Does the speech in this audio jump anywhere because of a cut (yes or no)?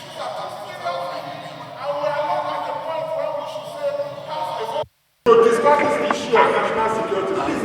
yes